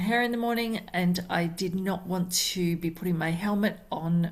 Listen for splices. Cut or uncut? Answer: uncut